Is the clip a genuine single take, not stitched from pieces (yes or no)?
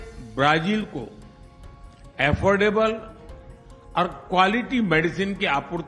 yes